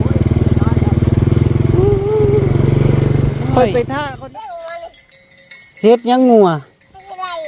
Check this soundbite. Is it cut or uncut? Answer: cut